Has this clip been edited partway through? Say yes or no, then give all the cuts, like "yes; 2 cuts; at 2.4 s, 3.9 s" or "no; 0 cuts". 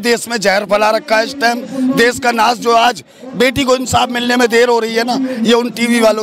no; 0 cuts